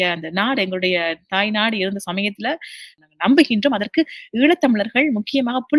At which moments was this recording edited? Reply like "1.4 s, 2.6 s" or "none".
2.9 s

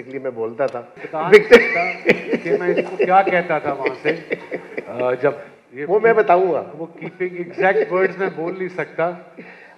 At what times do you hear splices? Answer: 1.0 s

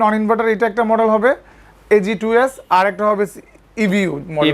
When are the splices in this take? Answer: none

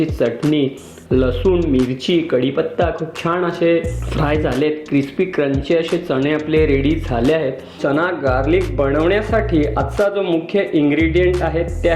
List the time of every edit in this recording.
7.7 s

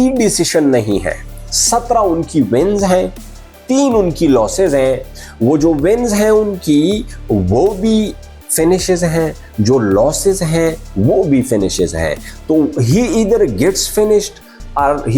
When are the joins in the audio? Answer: none

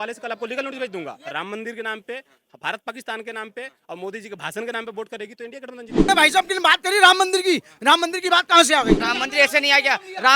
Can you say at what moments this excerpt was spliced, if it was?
1.2 s, 6.1 s, 9.0 s

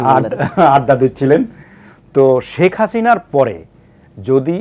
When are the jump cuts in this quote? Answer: none

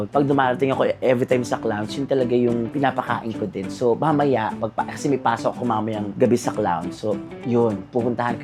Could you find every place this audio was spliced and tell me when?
none

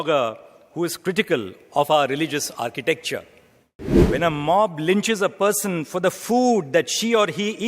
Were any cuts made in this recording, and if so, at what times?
4.0 s

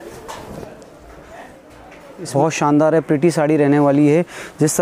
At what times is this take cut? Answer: 2.3 s

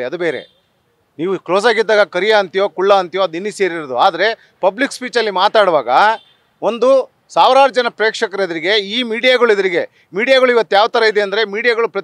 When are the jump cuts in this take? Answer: none

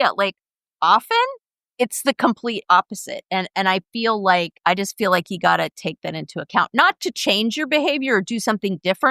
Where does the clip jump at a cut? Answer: 4.5 s

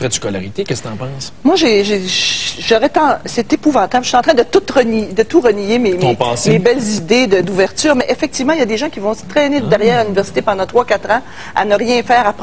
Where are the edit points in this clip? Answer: none

